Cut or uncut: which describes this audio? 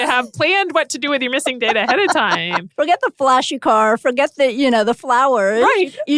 cut